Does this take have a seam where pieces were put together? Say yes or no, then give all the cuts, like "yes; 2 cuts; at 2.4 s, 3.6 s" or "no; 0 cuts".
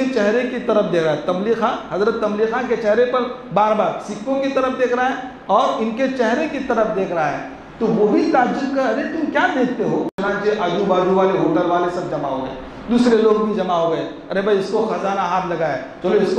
yes; 1 cut; at 10.1 s